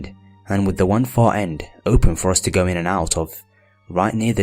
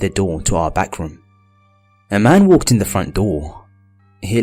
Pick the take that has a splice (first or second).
first